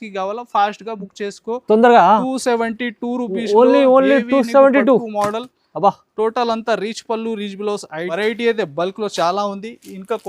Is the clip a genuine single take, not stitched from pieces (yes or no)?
no